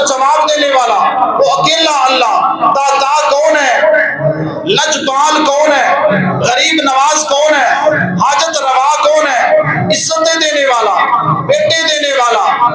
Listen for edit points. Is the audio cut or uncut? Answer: uncut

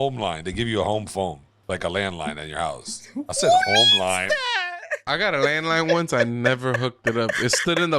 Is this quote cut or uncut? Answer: cut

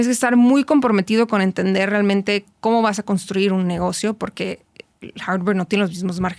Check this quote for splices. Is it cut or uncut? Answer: uncut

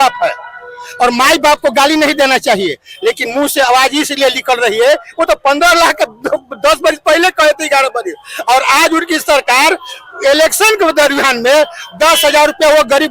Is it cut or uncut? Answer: uncut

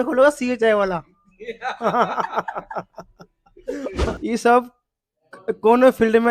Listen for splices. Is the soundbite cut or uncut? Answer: cut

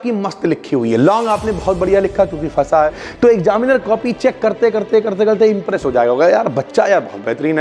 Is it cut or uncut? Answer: cut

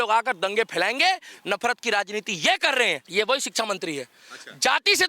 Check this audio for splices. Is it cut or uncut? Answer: cut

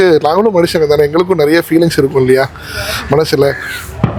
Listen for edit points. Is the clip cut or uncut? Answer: uncut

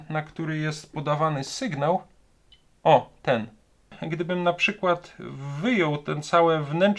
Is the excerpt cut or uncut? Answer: cut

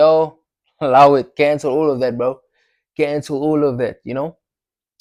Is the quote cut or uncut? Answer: uncut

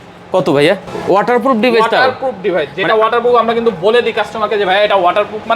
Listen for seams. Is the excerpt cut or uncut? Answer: cut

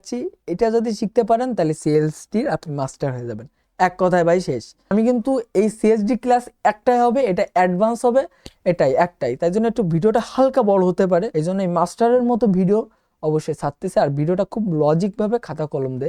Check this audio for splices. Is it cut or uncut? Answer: cut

